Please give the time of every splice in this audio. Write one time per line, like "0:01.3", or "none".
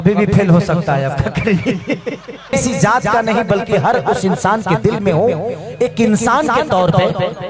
0:02.5